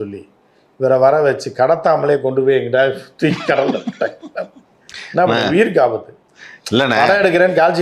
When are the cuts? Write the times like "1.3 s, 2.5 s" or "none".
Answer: none